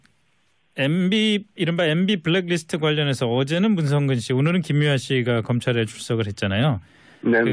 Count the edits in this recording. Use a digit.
1